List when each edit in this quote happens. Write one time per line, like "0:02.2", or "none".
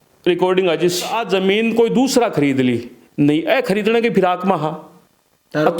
0:01.2